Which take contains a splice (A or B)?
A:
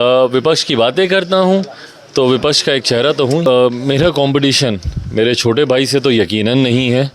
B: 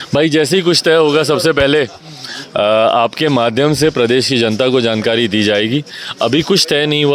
A